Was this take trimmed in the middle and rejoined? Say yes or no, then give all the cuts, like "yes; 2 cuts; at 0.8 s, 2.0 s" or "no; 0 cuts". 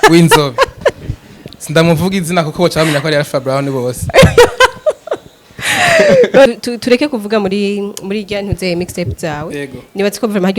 yes; 1 cut; at 6.5 s